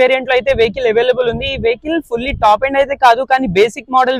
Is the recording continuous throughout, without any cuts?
yes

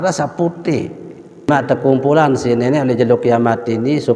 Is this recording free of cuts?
no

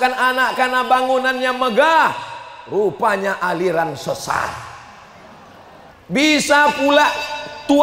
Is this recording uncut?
no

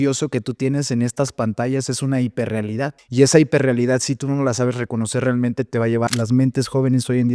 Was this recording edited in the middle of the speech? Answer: yes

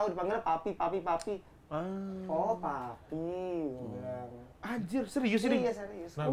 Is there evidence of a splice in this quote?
no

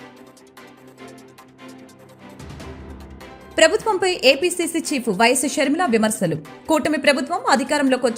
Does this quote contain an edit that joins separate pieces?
yes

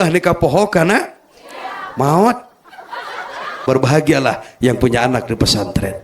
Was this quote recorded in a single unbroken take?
no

